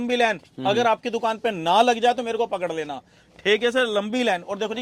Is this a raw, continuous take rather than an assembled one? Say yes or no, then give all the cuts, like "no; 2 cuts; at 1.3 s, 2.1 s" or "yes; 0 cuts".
yes; 0 cuts